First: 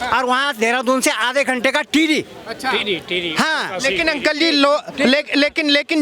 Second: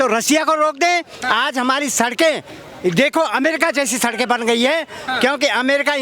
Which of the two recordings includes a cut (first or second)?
second